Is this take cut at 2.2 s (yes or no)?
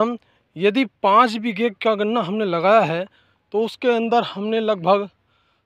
no